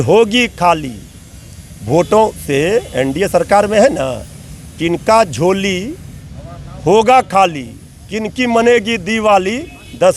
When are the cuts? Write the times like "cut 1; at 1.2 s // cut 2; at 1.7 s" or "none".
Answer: none